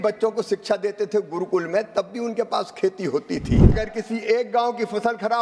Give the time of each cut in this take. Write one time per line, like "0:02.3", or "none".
0:03.7